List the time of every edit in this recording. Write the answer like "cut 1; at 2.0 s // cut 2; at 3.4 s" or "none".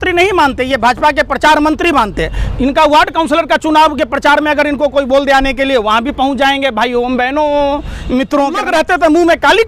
cut 1; at 8.6 s